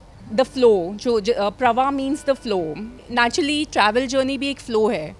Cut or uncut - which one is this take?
cut